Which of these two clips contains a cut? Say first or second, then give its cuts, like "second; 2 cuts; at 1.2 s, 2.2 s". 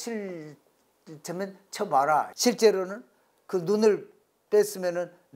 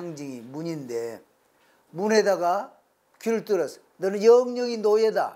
first; 1 cut; at 2.3 s